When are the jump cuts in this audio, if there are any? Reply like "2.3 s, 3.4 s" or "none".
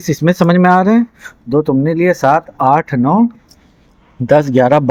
none